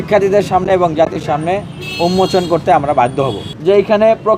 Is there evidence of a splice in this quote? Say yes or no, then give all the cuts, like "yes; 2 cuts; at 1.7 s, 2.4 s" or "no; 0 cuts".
yes; 1 cut; at 3.5 s